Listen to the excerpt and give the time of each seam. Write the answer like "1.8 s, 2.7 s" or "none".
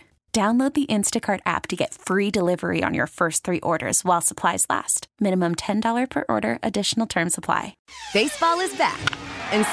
7.8 s